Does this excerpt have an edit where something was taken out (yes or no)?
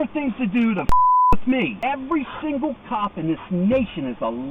yes